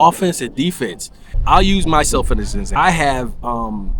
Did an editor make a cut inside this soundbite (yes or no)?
yes